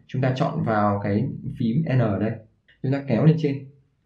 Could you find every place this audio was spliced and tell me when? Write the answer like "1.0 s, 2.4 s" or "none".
2.6 s